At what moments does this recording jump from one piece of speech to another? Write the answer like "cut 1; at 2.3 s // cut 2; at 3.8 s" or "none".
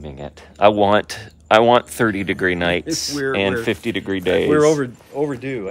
none